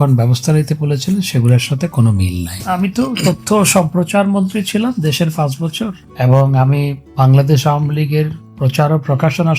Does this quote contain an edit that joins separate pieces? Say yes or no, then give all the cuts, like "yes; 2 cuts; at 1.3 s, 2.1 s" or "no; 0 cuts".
yes; 1 cut; at 2.6 s